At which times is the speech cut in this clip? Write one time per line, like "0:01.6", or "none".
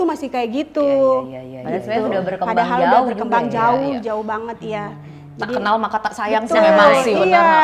none